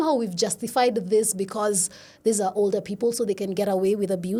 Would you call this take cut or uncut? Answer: uncut